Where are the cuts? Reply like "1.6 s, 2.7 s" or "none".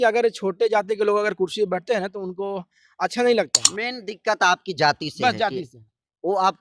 3.7 s